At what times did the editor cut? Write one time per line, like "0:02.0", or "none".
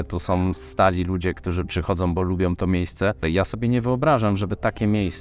0:03.2